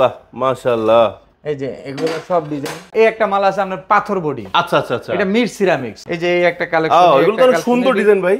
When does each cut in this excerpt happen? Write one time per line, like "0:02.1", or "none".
0:02.9
0:06.0